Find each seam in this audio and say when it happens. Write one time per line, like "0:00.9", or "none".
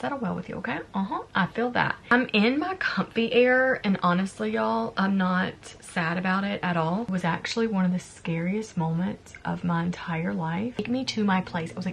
0:02.1
0:07.1
0:10.8

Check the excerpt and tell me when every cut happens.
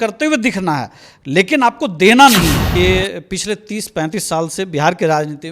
0:02.6

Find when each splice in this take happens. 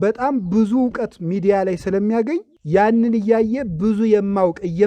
0:02.5

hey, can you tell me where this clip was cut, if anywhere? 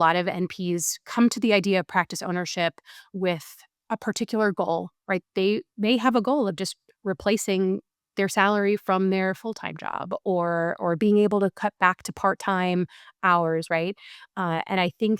0:05.2

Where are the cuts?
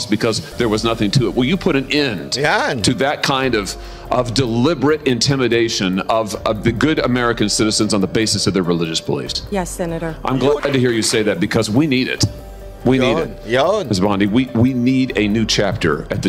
0:10.6

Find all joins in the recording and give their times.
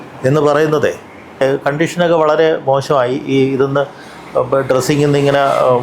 0:01.4

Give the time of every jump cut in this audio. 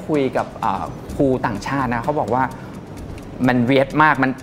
none

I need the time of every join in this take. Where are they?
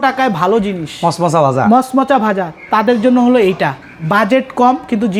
none

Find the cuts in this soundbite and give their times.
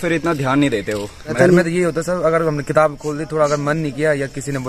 0:01.4

